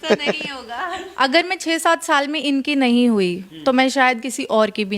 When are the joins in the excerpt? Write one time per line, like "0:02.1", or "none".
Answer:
0:01.0